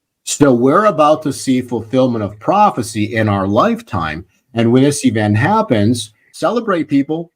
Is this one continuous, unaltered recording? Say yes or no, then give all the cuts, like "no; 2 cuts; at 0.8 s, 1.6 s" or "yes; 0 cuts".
no; 1 cut; at 6.2 s